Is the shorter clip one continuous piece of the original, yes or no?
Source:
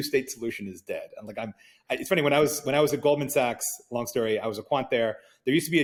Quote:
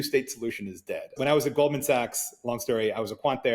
no